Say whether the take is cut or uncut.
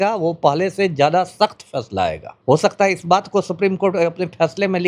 cut